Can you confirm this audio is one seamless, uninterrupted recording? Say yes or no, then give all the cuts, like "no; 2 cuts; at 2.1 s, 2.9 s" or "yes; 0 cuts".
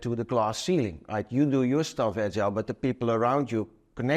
yes; 0 cuts